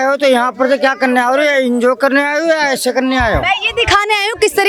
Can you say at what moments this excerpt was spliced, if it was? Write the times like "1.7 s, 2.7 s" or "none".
none